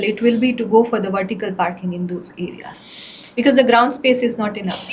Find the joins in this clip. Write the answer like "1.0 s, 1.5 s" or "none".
none